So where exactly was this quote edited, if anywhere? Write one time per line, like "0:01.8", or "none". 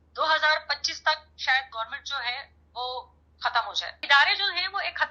0:04.0